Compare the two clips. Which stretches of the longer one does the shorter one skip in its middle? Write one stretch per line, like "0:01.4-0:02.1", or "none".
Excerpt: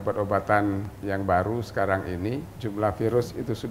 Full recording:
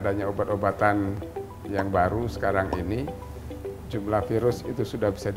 0:01.2-0:01.6
0:03.2-0:03.9